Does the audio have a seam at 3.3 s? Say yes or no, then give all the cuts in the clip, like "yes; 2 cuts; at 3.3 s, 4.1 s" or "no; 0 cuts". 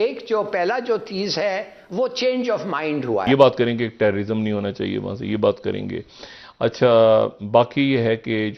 yes; 1 cut; at 3.3 s